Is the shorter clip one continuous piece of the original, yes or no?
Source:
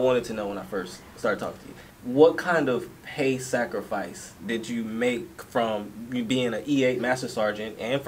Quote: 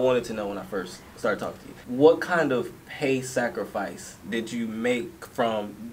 no